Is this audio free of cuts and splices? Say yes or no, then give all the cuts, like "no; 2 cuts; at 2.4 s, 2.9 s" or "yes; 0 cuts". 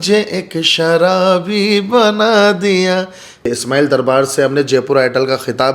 no; 1 cut; at 3.5 s